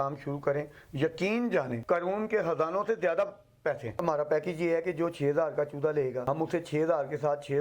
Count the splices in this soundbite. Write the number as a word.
three